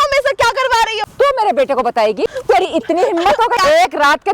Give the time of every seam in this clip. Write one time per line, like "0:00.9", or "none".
0:01.0
0:02.3
0:03.6